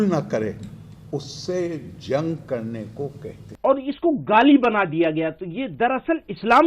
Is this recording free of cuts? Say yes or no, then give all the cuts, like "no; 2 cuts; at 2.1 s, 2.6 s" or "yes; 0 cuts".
no; 1 cut; at 3.5 s